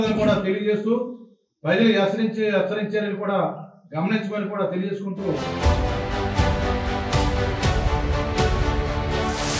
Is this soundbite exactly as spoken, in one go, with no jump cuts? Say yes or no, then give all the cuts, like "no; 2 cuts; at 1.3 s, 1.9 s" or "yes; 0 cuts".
no; 1 cut; at 5.6 s